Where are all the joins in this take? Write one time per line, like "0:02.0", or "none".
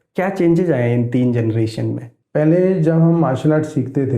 0:02.1